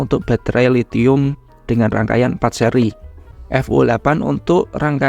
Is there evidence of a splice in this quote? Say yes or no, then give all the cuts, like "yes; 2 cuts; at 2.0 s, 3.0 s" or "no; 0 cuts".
yes; 1 cut; at 3.4 s